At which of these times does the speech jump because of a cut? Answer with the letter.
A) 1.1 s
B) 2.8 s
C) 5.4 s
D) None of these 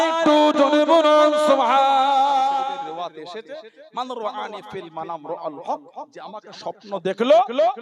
B